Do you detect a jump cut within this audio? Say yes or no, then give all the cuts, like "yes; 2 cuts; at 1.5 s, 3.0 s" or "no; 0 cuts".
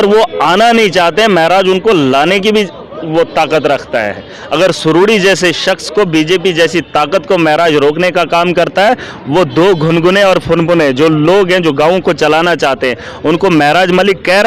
no; 0 cuts